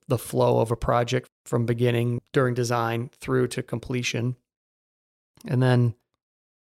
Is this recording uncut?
no; 2 cuts; at 1.3 s, 2.2 s

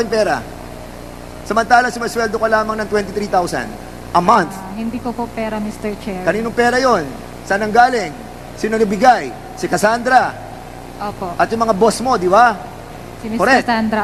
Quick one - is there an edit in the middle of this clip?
no; 0 cuts

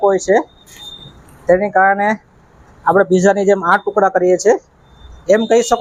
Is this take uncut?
yes; 0 cuts

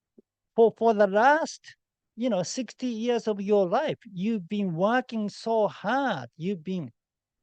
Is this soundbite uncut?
yes; 0 cuts

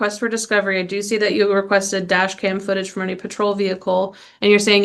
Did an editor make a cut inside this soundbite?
no; 0 cuts

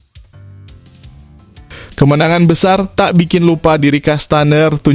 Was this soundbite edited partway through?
yes; 1 cut; at 1.7 s

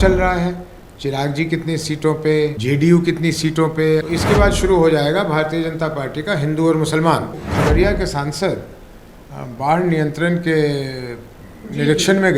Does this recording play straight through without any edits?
no; 2 cuts; at 4.0 s, 7.4 s

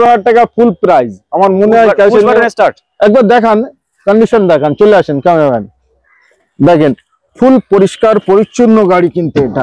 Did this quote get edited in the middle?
no; 0 cuts

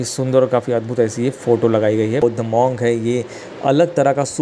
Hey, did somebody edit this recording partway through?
yes; 1 cut; at 2.2 s

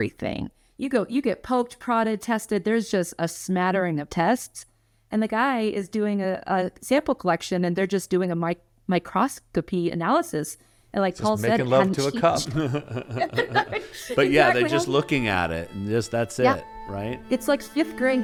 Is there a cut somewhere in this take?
no; 0 cuts

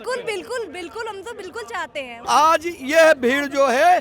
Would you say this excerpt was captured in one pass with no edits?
no; 1 cut; at 2.1 s

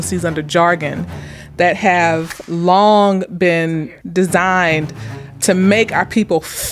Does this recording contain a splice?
yes; 3 cuts; at 2.4 s, 3.8 s, 5.2 s

